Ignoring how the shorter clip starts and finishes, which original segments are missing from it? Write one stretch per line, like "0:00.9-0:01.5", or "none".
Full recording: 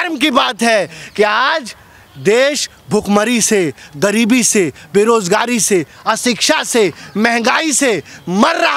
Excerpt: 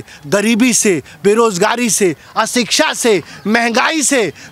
none